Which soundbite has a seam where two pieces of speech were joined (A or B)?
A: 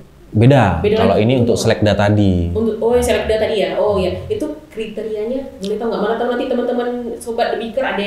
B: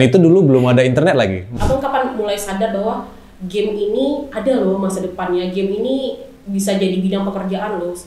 B